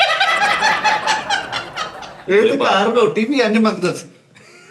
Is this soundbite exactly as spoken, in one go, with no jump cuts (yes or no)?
no